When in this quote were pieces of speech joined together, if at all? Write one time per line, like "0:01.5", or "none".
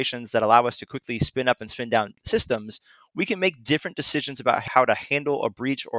0:02.2
0:04.6

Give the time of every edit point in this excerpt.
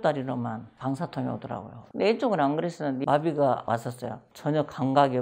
0:03.0
0:03.6

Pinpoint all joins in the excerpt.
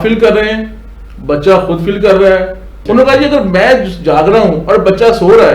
0:02.8

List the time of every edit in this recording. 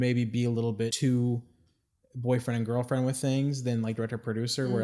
0:00.9

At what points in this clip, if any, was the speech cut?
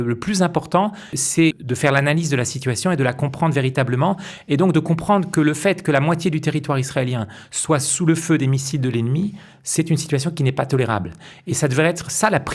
0:01.4

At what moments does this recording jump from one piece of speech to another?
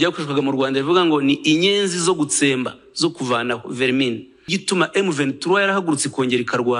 0:04.6

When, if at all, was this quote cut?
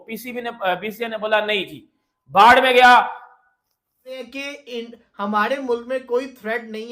0:04.2

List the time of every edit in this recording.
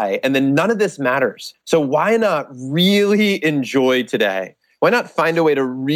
0:01.5

